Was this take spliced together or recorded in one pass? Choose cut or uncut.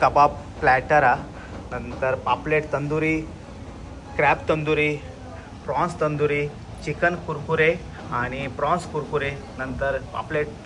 uncut